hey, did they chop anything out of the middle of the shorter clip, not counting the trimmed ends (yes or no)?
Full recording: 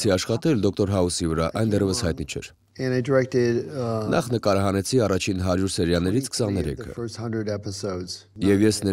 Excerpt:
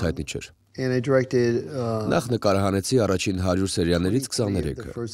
no